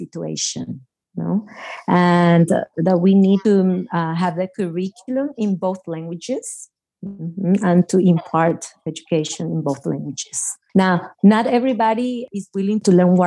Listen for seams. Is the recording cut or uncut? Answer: cut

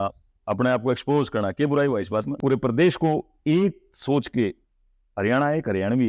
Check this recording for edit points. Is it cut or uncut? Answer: cut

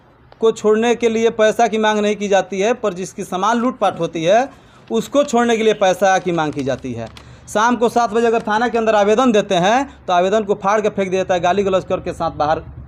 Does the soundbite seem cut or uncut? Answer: uncut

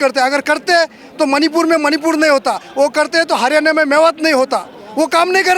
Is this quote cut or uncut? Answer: uncut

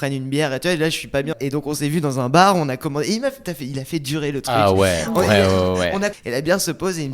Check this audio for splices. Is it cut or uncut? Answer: cut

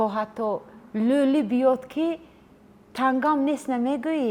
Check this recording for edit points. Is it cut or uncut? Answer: uncut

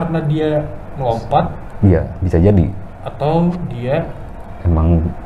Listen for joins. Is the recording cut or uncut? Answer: uncut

